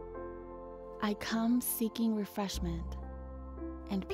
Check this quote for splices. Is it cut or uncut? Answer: cut